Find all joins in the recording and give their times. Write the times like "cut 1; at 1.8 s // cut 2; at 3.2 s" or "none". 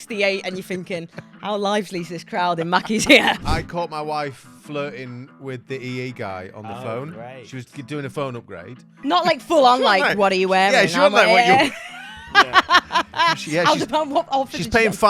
cut 1; at 3.4 s // cut 2; at 8.9 s